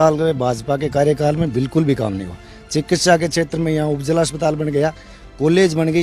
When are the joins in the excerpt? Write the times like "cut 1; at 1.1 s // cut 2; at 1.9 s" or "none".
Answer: none